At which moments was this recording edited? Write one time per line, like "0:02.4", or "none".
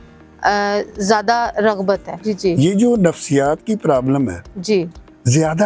0:02.2